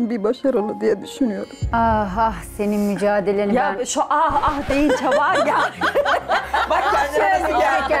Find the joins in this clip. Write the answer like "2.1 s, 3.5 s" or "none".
1.6 s